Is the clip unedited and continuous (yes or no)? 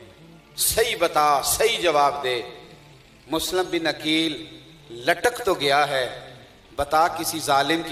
yes